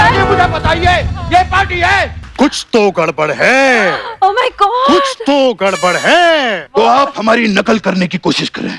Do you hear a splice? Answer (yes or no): yes